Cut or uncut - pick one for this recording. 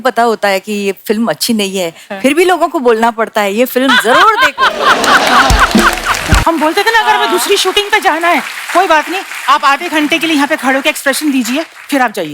cut